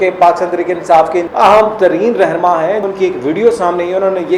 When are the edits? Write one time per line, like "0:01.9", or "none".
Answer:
0:01.2
0:02.8